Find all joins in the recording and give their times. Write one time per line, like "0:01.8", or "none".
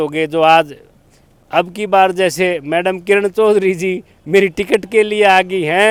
none